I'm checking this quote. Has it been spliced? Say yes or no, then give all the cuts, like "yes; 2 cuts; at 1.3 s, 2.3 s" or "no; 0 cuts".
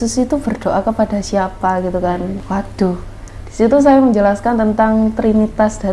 yes; 1 cut; at 2.4 s